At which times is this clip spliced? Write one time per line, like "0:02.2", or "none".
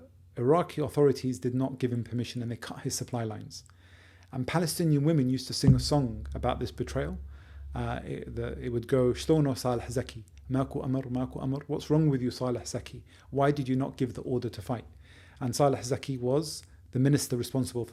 none